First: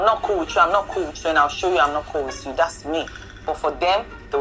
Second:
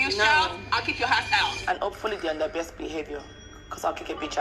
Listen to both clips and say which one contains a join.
second; 1 cut; at 1.6 s

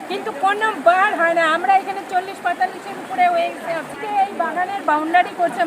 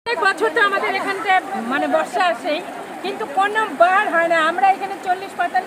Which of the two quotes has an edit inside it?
first; 1 cut; at 3.9 s

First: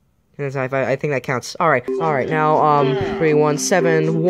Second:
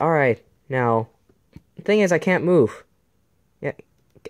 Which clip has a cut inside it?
first; 1 cut; at 1.9 s

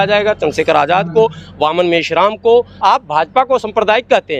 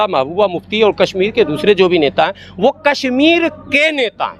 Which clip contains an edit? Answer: first; 1 cut; at 2.7 s

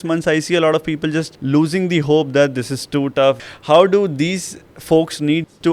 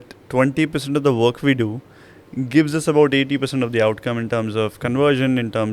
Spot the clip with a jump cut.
first; 2 cuts; at 1.3 s, 3.4 s

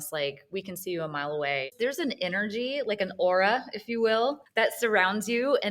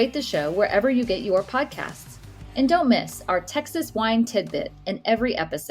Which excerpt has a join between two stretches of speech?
first; 1 cut; at 1.7 s

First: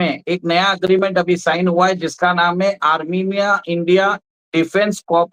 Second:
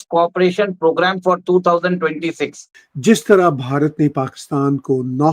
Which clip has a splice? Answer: second; 1 cut; at 2.9 s

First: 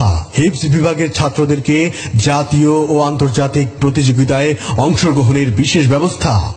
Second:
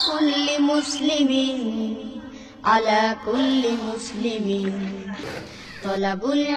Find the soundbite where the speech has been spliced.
second; 1 cut; at 2.7 s

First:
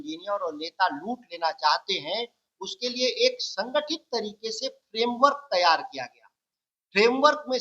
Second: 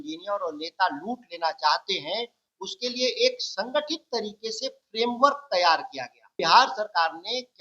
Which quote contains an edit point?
second; 1 cut; at 6.3 s

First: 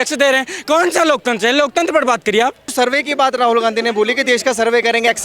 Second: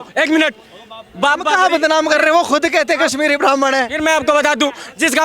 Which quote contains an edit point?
first; 1 cut; at 2.7 s

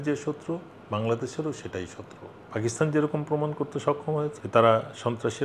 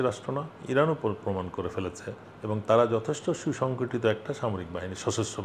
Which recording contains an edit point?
first; 2 cuts; at 2.3 s, 4.4 s

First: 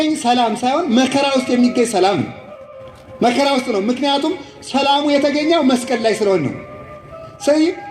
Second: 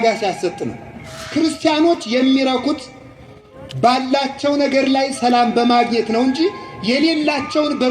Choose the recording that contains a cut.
second; 1 cut; at 1.2 s

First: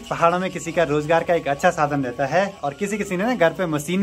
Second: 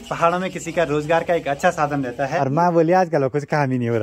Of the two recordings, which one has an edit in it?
second; 1 cut; at 2.4 s

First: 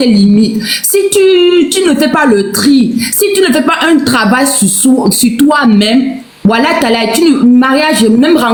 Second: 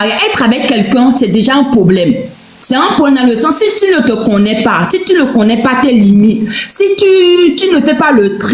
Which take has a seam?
second; 1 cut; at 1.1 s

